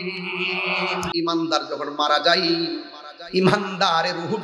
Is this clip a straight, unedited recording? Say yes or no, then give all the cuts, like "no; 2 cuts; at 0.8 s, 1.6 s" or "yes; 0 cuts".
no; 1 cut; at 1.1 s